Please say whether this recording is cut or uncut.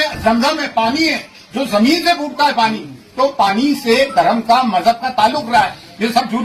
uncut